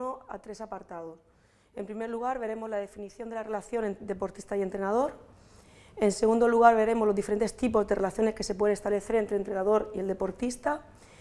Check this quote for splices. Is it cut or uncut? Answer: cut